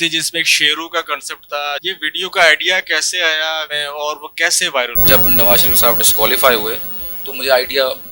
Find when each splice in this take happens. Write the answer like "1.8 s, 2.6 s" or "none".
1.8 s, 3.8 s, 5.0 s